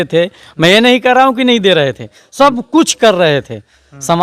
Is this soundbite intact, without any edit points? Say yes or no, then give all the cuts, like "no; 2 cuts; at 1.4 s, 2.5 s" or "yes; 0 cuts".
yes; 0 cuts